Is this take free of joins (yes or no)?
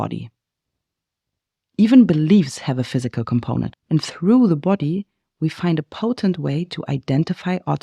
no